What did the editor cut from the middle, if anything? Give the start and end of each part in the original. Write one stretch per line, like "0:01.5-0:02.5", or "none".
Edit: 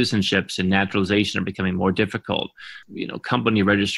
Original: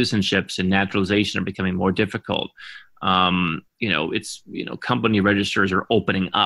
0:02.8-0:04.4